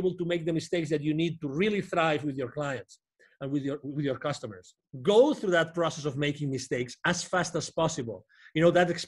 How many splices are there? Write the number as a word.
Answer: one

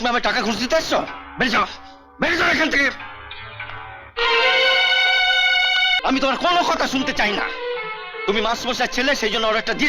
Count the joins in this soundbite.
one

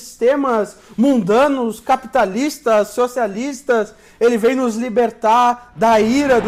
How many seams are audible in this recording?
zero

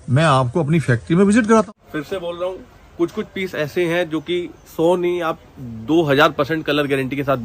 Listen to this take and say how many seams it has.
one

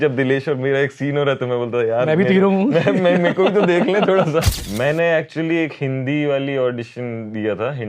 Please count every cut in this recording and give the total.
one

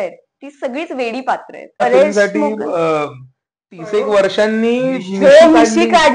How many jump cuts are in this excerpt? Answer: one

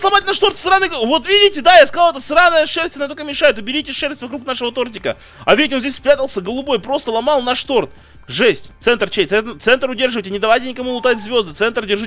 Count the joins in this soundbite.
zero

